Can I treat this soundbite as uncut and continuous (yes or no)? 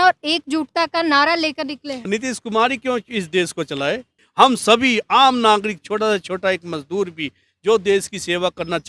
no